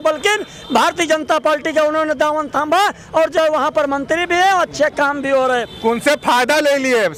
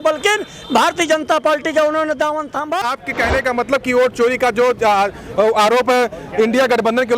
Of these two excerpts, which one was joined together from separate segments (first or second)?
second